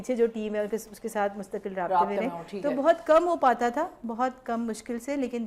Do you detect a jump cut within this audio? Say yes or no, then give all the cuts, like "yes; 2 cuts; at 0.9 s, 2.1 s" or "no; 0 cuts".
no; 0 cuts